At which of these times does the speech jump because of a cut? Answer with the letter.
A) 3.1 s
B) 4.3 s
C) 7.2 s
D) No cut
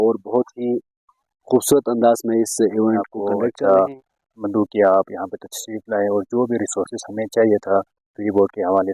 A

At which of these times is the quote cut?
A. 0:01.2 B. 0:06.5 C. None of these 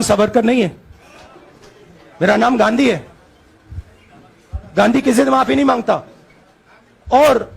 C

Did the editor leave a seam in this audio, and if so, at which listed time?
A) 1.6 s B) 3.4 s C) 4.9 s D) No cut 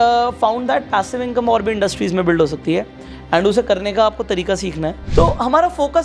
C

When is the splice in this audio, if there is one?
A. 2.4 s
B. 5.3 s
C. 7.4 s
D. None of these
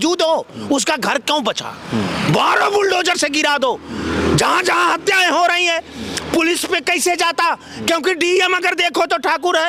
D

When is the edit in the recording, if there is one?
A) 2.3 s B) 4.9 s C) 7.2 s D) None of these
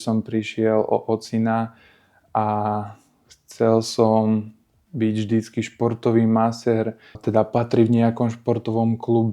C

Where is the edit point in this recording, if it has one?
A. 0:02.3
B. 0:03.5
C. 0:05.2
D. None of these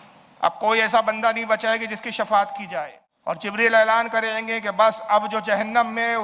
B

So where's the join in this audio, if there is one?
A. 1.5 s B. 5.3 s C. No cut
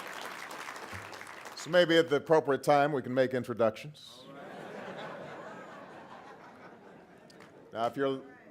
B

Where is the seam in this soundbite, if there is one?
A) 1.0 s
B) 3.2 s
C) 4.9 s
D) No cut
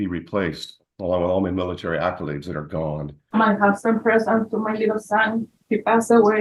B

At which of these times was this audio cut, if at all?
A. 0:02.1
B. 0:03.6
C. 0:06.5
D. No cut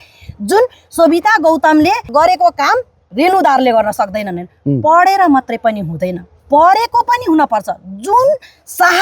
A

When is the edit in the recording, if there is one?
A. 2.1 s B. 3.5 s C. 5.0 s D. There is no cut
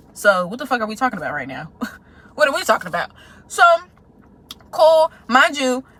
D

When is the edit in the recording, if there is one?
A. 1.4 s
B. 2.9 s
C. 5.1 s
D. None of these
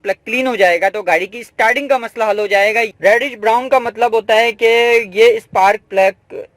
B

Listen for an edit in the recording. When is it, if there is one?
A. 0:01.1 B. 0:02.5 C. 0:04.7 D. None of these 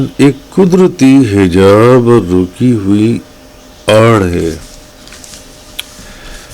D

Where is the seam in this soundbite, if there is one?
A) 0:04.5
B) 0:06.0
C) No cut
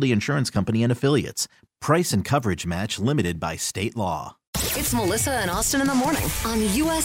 A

